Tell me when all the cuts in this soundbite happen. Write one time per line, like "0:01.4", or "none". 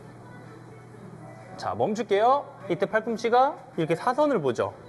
0:02.5
0:03.6